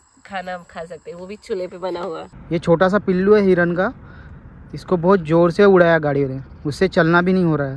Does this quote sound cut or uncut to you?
cut